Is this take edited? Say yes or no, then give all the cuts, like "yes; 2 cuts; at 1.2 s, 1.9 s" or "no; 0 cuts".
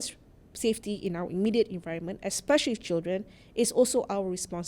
no; 0 cuts